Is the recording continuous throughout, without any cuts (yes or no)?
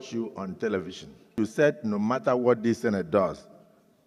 no